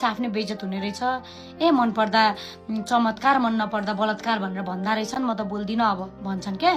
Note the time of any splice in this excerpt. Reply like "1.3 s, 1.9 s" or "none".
none